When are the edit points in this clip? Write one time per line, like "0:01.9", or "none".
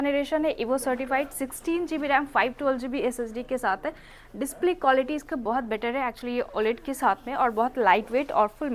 none